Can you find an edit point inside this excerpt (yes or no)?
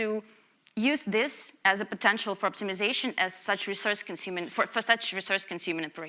no